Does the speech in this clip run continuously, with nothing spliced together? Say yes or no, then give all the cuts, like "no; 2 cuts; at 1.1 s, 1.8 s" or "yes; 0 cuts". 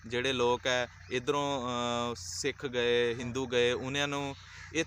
yes; 0 cuts